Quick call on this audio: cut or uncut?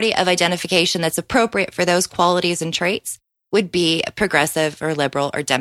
uncut